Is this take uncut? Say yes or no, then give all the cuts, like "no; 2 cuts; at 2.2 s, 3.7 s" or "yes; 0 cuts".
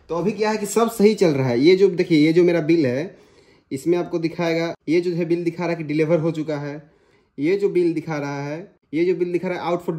yes; 0 cuts